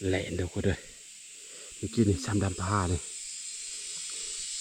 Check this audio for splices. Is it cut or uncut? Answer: uncut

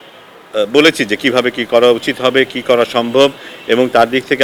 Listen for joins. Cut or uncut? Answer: uncut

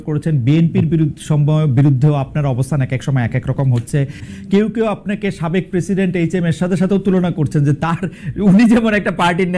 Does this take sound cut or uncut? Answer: cut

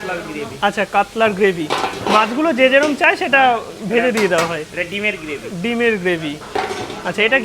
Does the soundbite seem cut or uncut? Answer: uncut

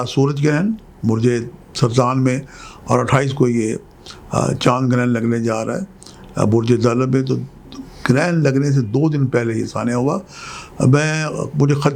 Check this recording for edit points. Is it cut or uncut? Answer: uncut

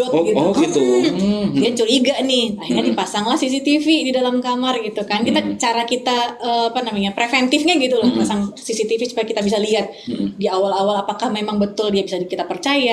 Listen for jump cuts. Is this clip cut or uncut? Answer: uncut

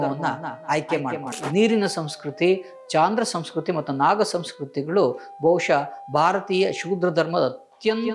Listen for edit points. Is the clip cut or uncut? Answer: cut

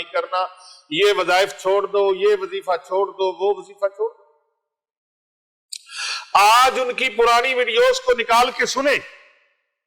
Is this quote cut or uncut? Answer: uncut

